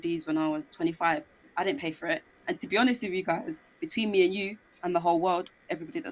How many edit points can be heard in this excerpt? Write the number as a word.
zero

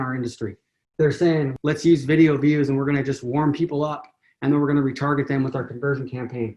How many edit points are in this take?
one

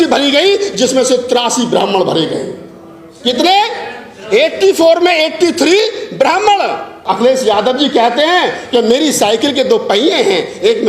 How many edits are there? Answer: one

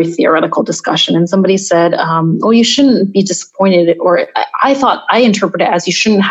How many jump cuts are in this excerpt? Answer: zero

